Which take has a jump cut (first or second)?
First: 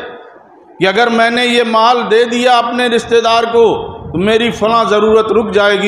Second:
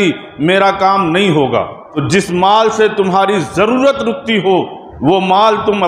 second